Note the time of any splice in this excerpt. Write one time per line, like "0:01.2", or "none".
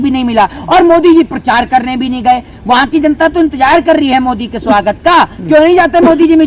none